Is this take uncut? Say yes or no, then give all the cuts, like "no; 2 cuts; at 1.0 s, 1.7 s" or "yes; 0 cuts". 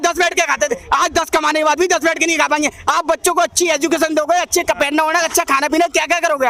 yes; 0 cuts